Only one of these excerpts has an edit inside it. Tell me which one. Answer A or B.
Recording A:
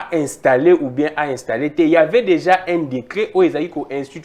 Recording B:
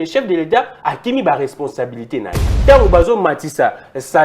B